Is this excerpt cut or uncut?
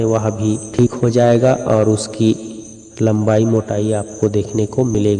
uncut